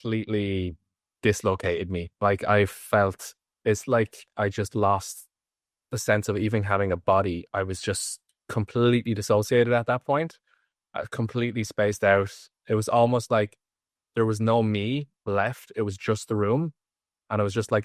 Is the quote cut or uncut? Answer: uncut